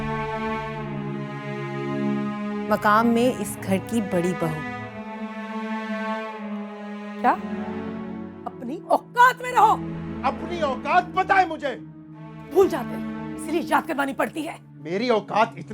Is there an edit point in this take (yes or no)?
yes